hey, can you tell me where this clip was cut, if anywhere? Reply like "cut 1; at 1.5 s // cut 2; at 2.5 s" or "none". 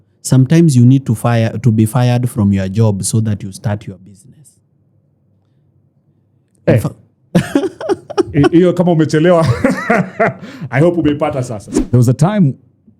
cut 1; at 11.6 s